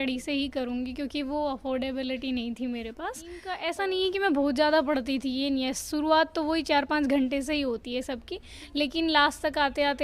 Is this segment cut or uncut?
cut